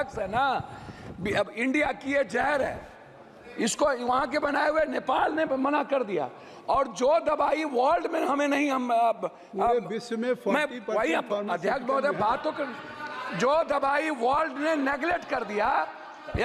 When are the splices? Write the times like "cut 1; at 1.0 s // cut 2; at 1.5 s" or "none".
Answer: none